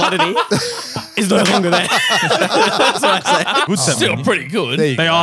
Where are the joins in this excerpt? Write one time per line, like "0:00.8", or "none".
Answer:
0:03.7